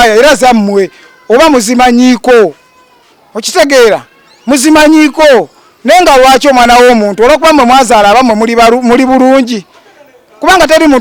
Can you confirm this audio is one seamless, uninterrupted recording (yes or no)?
yes